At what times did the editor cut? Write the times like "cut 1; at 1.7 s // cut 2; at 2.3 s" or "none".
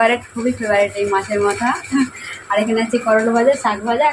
none